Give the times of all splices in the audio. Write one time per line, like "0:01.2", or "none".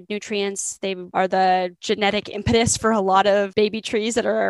0:01.0
0:01.8
0:03.5